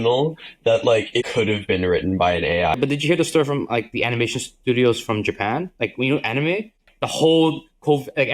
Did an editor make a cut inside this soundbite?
yes; 2 cuts; at 2.8 s, 6.9 s

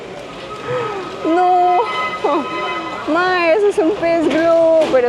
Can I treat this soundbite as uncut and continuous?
yes; 0 cuts

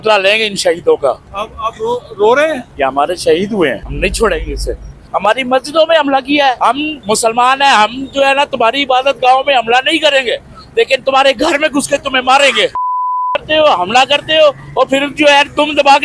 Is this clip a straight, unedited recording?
no; 5 cuts; at 2.7 s, 3.9 s, 5.0 s, 6.7 s, 12.8 s

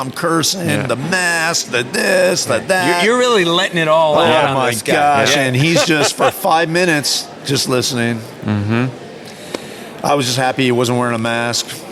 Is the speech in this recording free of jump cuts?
yes; 0 cuts

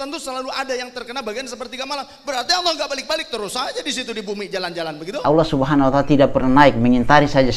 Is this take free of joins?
no; 1 cut; at 5.2 s

